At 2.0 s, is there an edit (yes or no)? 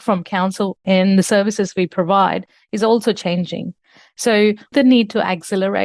no